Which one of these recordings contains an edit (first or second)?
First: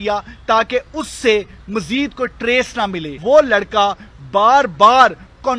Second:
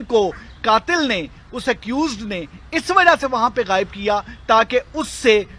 first